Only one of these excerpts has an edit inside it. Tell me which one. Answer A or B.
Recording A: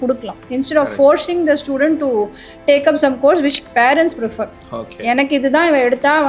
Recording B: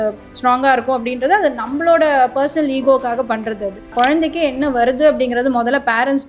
B